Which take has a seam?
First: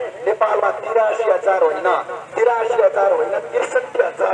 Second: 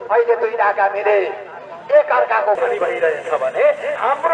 second; 1 cut; at 2.6 s

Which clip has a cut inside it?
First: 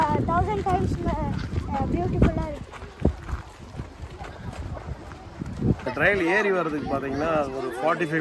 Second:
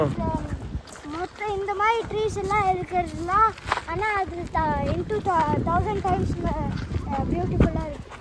first; 1 cut; at 5.8 s

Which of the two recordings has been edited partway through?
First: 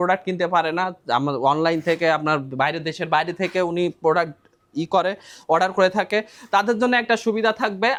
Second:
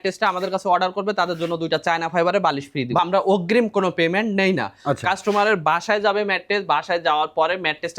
second; 1 cut; at 3.0 s

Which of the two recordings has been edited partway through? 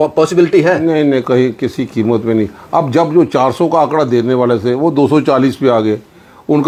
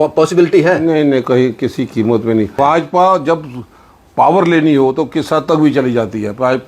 second; 1 cut; at 2.5 s

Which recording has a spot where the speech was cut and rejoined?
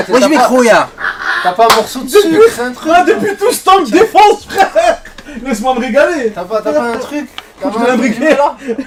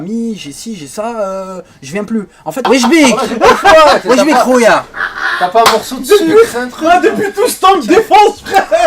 second; 1 cut; at 2.6 s

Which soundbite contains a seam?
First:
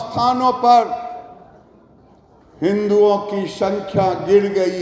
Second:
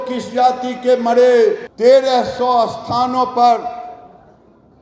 second; 1 cut; at 1.7 s

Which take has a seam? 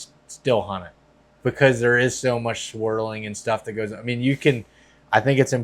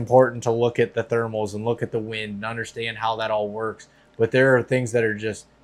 first; 1 cut; at 1.3 s

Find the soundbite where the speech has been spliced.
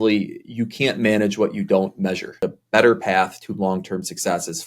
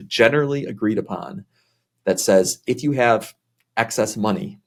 first; 1 cut; at 2.3 s

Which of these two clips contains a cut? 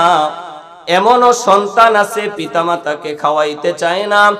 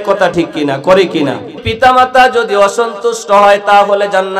second; 1 cut; at 1.6 s

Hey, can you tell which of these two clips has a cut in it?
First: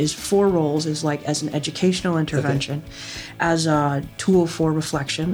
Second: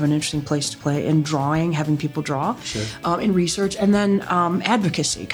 first; 1 cut; at 3.9 s

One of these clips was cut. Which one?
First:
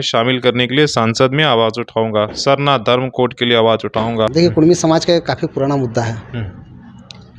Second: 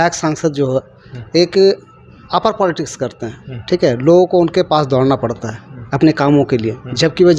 first; 1 cut; at 4.3 s

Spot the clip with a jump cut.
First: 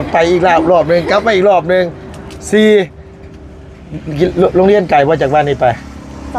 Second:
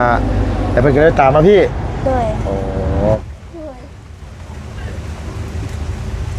second; 1 cut; at 3.2 s

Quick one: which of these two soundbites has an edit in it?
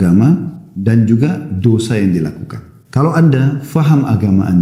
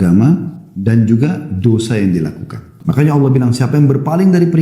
second; 1 cut; at 2.7 s

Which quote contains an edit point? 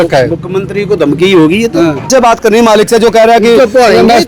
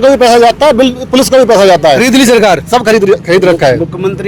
first; 1 cut; at 2.1 s

